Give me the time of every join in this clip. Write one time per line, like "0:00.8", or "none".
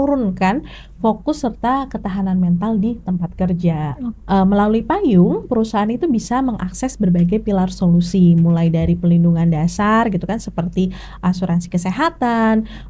0:04.1